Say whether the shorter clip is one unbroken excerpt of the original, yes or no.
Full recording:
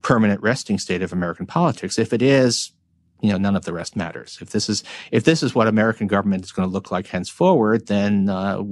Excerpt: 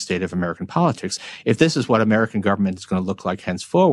no